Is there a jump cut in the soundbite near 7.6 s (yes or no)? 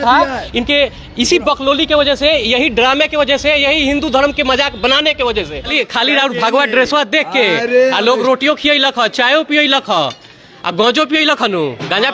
no